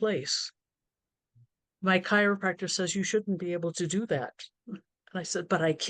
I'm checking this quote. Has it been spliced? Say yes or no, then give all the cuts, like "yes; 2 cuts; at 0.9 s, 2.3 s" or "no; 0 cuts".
no; 0 cuts